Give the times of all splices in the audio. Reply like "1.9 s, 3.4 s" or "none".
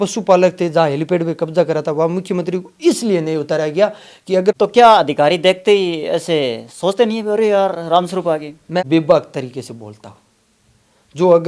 4.6 s, 8.8 s